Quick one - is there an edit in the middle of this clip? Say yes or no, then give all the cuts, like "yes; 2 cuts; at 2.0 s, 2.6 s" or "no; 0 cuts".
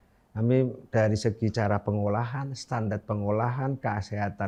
no; 0 cuts